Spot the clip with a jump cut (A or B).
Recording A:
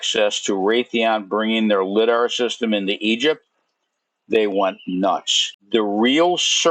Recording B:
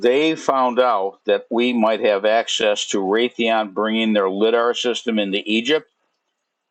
A